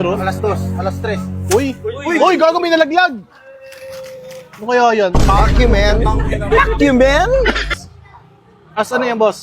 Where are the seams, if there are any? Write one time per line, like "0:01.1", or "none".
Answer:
0:07.7